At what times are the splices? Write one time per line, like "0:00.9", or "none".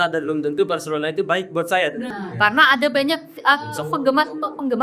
0:02.1